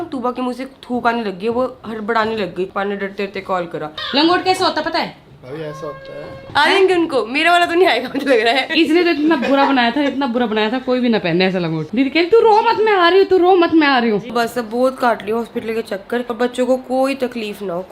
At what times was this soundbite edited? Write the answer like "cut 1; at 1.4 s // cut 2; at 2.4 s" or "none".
cut 1; at 2.7 s // cut 2; at 3.9 s // cut 3; at 6.4 s // cut 4; at 8.7 s // cut 5; at 11.8 s // cut 6; at 14.3 s // cut 7; at 16.3 s